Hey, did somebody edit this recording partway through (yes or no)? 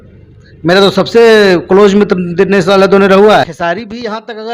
yes